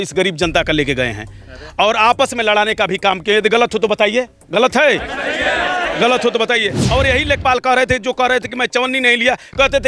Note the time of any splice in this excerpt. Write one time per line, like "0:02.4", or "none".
0:06.8